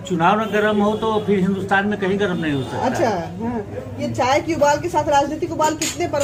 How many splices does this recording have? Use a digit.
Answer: 0